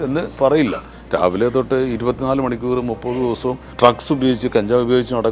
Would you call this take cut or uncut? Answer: cut